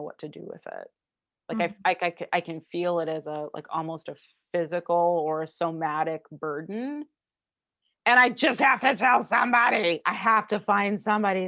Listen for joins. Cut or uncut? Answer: uncut